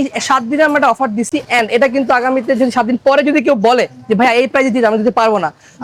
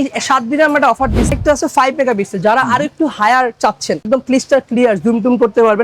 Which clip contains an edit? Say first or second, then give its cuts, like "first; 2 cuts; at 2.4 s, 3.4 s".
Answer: second; 2 cuts; at 1.3 s, 4.0 s